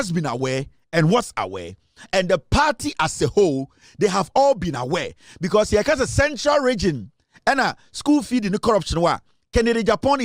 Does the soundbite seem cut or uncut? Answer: uncut